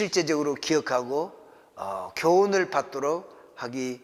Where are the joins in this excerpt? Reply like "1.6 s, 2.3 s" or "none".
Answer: none